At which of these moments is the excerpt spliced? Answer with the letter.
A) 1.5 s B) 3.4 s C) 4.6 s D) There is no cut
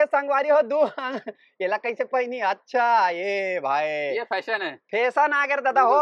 D